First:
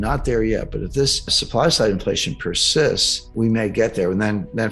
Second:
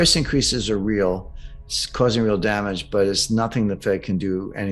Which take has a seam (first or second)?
first